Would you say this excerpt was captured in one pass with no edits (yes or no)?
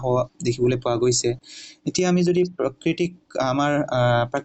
yes